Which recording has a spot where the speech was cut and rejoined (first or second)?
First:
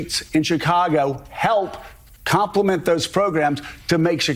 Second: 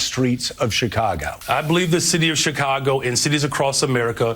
second